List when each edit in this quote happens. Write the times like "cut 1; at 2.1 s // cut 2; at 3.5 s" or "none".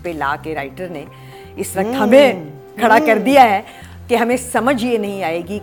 none